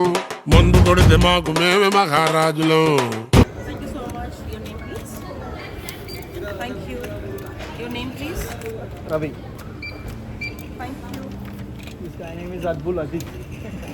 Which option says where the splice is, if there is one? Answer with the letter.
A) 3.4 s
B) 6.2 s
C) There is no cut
A